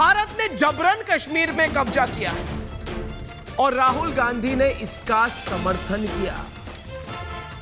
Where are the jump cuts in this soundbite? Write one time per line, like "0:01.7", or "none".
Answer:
none